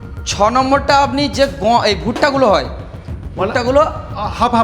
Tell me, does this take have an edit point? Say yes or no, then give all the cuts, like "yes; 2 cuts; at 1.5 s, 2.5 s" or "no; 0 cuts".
no; 0 cuts